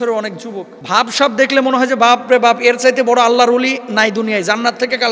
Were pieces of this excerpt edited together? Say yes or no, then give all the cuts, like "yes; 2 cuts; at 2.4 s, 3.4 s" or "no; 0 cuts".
no; 0 cuts